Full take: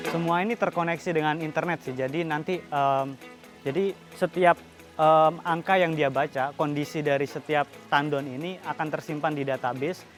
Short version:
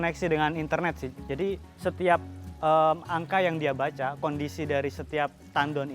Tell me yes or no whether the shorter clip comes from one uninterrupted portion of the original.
no